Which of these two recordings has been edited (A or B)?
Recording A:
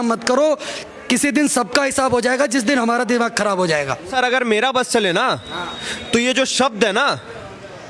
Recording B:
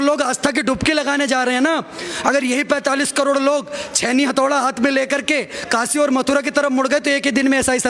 A